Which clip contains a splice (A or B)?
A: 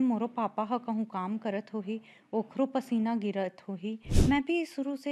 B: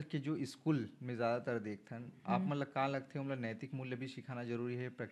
A